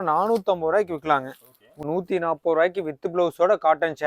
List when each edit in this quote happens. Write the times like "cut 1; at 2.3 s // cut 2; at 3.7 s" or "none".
cut 1; at 1.8 s